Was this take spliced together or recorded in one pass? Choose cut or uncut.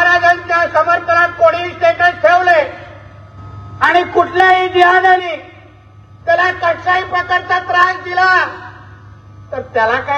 uncut